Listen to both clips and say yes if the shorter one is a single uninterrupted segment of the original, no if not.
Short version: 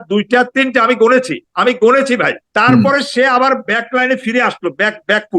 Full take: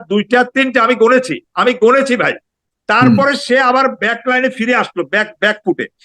no